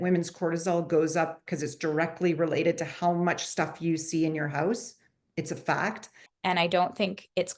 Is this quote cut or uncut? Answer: cut